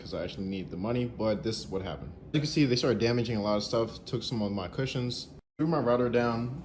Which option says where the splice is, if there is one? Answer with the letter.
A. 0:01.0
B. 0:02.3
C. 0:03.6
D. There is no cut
D